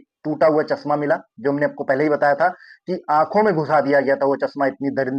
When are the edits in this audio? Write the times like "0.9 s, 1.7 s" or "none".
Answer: none